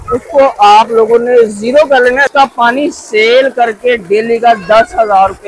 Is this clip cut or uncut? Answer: cut